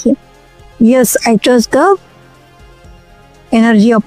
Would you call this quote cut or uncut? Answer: uncut